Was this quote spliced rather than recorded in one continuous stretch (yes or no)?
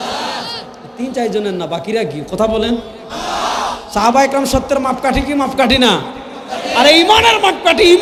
no